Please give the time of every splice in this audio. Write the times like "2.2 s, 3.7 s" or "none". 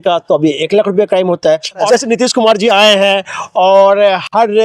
1.9 s